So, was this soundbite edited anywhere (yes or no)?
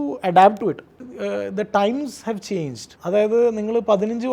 yes